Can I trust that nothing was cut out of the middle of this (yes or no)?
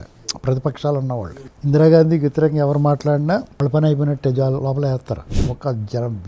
no